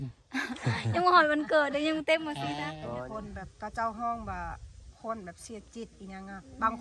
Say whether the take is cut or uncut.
cut